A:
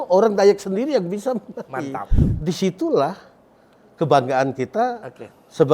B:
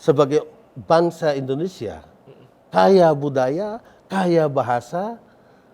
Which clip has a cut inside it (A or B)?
A